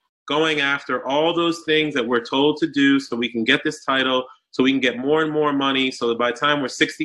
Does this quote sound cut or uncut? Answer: uncut